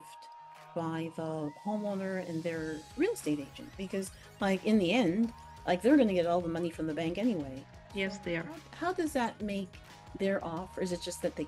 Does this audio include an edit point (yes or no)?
no